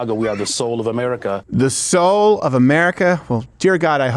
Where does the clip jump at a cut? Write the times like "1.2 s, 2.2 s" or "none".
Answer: 1.4 s